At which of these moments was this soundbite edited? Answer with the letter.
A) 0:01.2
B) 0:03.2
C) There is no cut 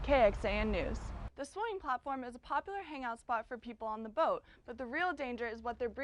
A